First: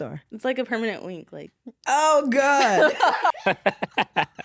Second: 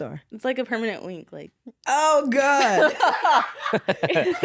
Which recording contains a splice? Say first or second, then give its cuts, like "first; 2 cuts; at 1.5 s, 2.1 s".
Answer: first; 1 cut; at 3.3 s